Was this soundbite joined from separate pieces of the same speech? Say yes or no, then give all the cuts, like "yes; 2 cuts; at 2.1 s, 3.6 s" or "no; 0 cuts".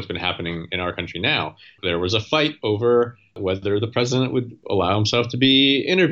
yes; 3 cuts; at 1.8 s, 3.4 s, 4.6 s